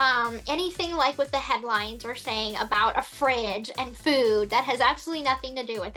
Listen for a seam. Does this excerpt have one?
no; 0 cuts

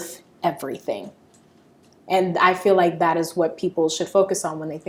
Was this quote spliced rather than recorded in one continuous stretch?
no; 0 cuts

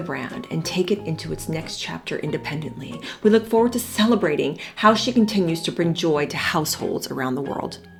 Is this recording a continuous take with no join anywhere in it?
yes; 0 cuts

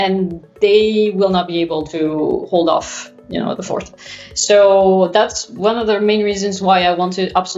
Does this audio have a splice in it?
no; 0 cuts

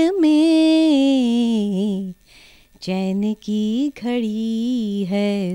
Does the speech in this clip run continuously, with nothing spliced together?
yes; 0 cuts

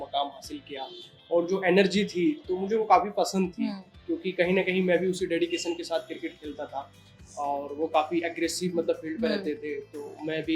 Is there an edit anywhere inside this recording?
no; 0 cuts

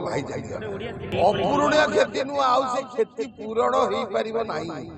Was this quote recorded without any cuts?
no; 1 cut; at 1.1 s

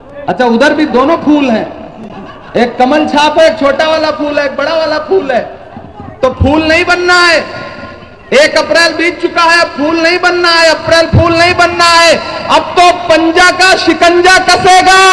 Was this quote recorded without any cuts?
yes; 0 cuts

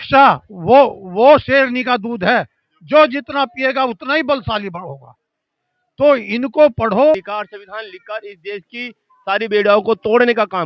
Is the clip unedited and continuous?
no; 1 cut; at 7.3 s

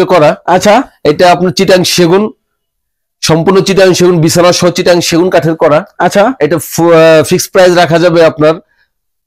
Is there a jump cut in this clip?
no; 0 cuts

